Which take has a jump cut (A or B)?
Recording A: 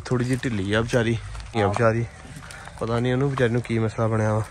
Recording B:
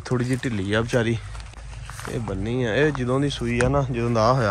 A